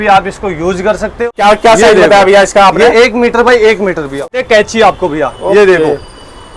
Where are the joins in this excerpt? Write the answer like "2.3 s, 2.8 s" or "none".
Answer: 1.1 s, 4.3 s